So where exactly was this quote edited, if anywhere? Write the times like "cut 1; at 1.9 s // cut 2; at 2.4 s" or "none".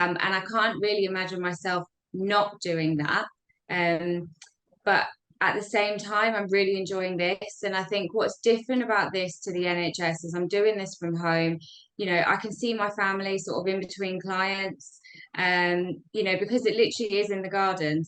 none

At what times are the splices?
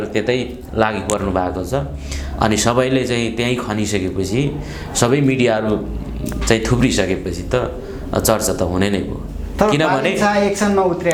none

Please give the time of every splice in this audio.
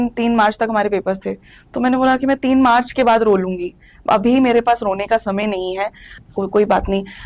cut 1; at 6.1 s

